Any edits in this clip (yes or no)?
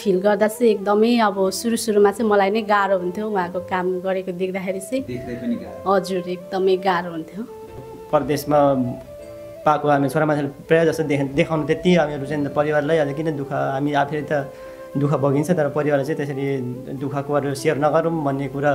yes